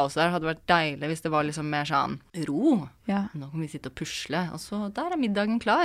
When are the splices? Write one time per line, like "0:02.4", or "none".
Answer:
0:02.3

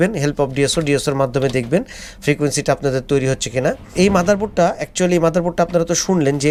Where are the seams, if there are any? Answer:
none

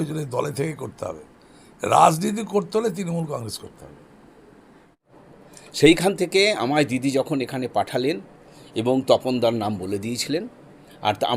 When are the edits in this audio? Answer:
0:04.8

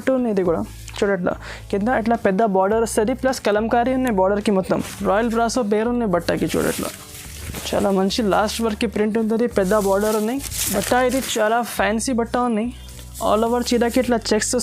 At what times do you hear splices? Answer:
0:04.8
0:10.5

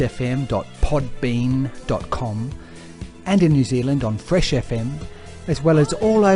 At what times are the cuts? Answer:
none

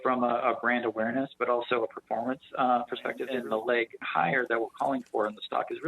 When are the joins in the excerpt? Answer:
0:03.2

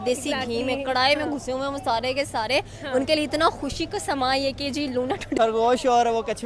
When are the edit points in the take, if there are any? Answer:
0:05.4

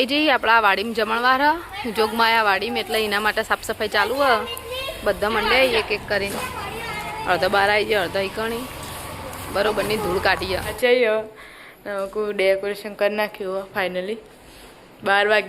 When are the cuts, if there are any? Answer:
0:10.7

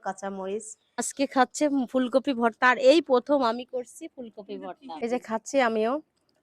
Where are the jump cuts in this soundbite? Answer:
0:01.1
0:04.8

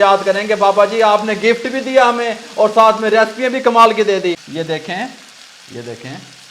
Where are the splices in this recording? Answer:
0:04.4

